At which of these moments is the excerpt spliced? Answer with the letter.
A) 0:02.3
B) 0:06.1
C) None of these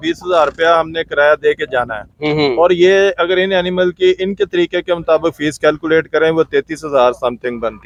C